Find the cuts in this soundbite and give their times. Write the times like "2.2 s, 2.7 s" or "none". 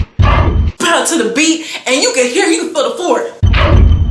none

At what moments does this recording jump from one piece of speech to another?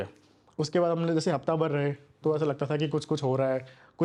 none

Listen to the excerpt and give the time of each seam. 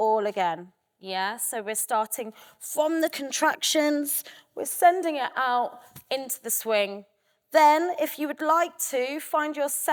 none

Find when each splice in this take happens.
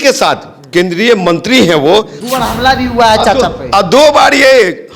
2.2 s

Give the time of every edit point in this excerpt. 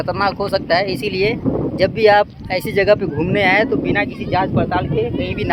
none

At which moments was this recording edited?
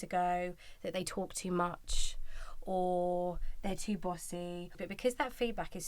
4.8 s

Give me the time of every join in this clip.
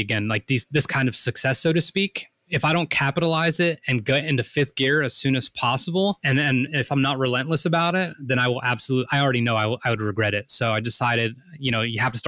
2.5 s, 6.2 s

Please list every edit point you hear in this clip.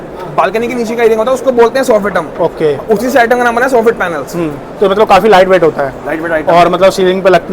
none

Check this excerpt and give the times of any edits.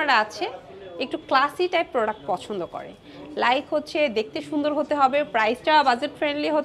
none

